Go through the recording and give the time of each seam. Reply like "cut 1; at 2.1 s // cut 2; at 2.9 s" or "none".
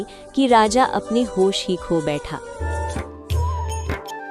cut 1; at 2.6 s